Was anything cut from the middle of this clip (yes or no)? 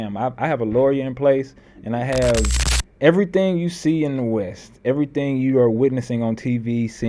yes